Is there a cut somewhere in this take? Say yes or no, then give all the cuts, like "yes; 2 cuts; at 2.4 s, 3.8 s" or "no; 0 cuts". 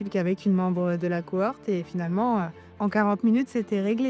no; 0 cuts